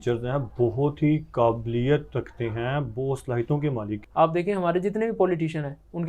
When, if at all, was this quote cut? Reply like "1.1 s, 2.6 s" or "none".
4.0 s

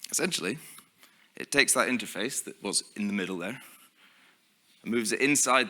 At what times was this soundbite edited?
none

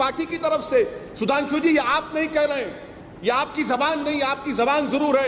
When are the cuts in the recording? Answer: none

